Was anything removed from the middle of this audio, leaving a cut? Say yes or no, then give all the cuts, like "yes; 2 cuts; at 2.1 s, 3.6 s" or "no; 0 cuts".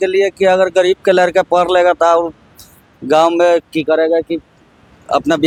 no; 0 cuts